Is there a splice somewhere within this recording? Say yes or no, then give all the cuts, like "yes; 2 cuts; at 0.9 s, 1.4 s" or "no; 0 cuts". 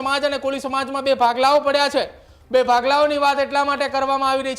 no; 0 cuts